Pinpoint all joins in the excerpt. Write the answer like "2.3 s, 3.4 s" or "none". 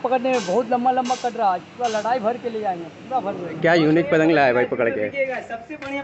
3.6 s